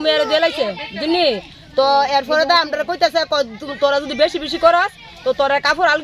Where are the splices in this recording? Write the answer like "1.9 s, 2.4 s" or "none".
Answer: none

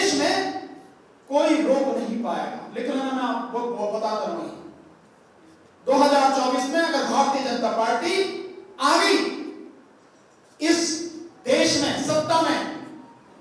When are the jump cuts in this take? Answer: none

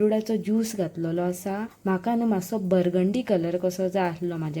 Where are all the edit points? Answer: 1.7 s

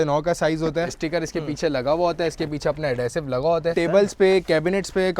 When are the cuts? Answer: 1.0 s, 3.7 s

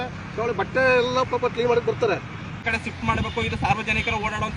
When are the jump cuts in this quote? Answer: 2.6 s

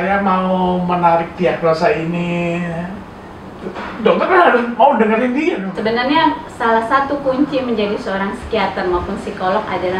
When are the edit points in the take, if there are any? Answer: 5.6 s

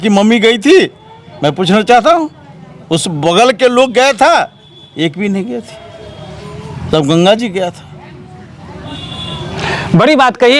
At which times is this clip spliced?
none

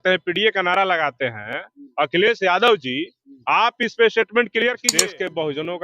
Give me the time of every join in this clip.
4.9 s

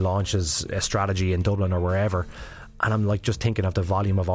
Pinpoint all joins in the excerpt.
none

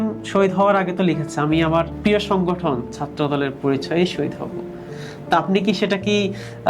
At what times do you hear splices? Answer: 1.9 s

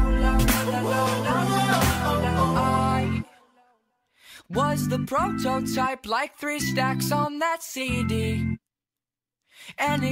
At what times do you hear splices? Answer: none

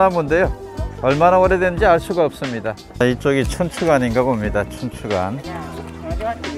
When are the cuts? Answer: 2.9 s

